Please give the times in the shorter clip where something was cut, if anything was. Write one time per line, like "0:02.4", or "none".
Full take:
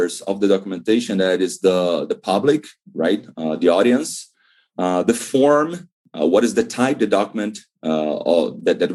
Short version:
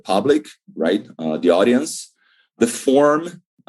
0:02.5